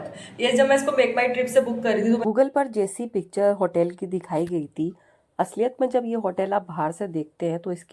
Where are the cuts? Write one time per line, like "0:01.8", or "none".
0:02.2